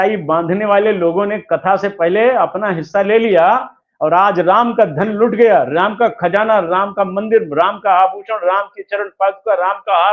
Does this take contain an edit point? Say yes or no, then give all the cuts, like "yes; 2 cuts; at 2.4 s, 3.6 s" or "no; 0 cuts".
no; 0 cuts